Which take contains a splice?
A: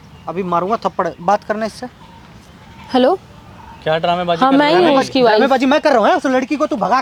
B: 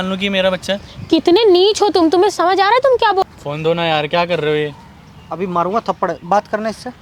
B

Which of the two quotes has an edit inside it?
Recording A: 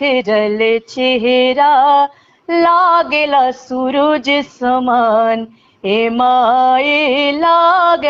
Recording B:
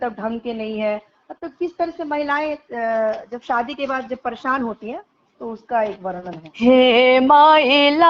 B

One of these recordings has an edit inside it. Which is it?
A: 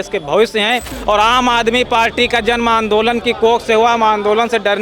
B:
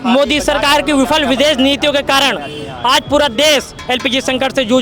A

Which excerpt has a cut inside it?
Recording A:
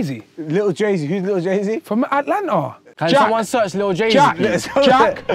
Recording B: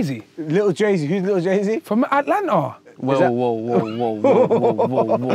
A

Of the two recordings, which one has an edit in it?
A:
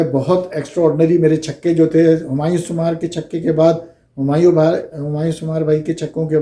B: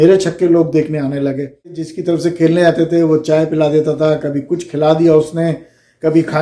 B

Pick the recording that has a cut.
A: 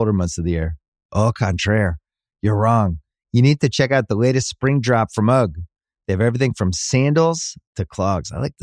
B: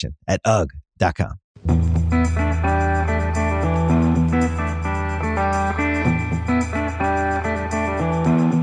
B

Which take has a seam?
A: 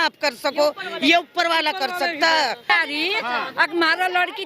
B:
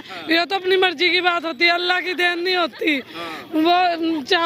A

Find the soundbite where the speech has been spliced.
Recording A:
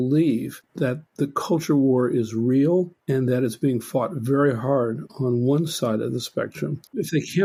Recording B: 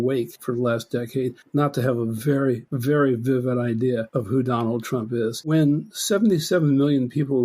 B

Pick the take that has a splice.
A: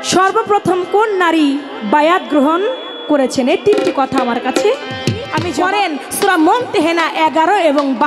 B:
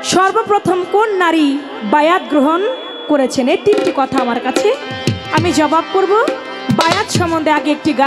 A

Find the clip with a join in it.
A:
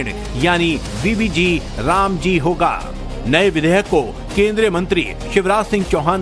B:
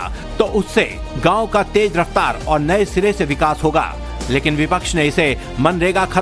B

